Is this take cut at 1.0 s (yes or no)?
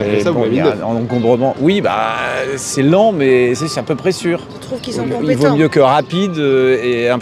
no